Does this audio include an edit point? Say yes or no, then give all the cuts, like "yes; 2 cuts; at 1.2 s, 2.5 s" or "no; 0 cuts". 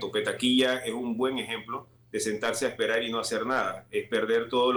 no; 0 cuts